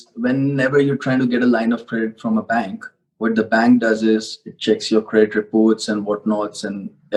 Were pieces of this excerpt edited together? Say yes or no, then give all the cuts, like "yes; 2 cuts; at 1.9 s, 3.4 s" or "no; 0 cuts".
no; 0 cuts